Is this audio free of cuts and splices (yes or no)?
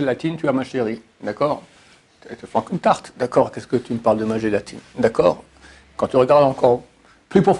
yes